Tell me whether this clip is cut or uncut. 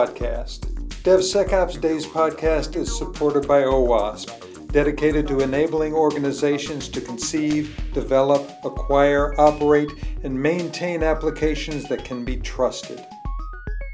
uncut